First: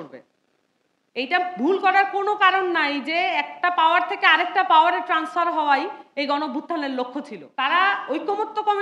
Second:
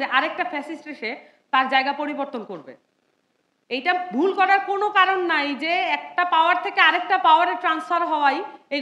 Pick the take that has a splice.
first; 1 cut; at 7.8 s

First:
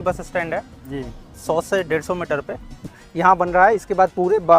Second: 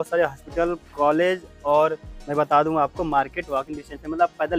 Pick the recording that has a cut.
first; 1 cut; at 2.9 s

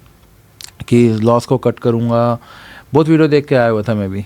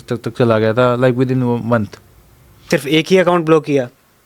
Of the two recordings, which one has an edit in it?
second; 1 cut; at 2.7 s

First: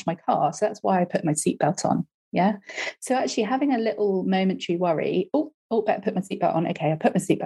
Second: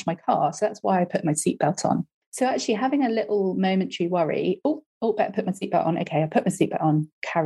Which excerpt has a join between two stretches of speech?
second; 1 cut; at 2.2 s

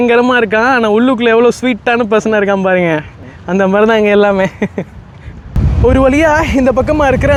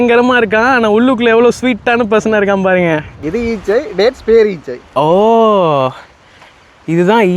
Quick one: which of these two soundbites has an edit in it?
second; 1 cut; at 3.2 s

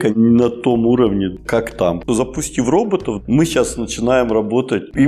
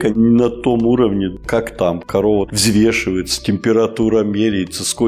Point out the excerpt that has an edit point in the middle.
first; 1 cut; at 2.0 s

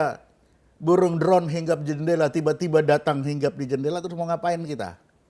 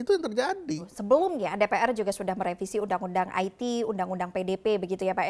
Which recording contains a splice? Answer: second; 1 cut; at 0.9 s

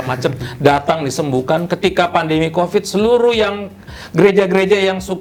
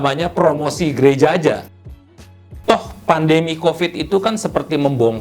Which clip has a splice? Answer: second; 1 cut; at 2.1 s

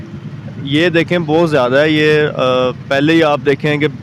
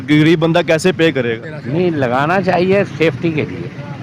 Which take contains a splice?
second; 1 cut; at 1.5 s

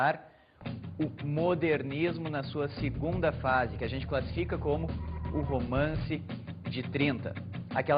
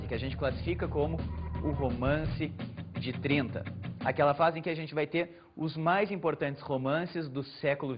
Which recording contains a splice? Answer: second; 1 cut; at 5.4 s

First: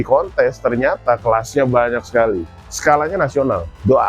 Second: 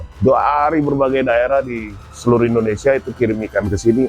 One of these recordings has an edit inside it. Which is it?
first; 1 cut; at 2.6 s

